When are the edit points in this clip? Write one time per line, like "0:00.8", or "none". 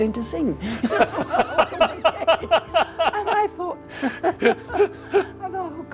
none